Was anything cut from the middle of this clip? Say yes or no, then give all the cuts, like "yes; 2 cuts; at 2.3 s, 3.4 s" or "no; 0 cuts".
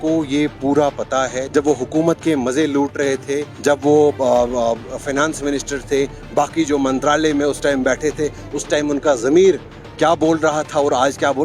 yes; 2 cuts; at 1.4 s, 3.5 s